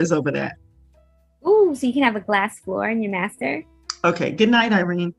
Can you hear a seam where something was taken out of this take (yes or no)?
no